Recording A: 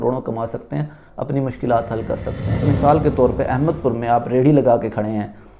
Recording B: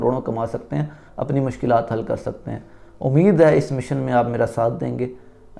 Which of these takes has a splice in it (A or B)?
A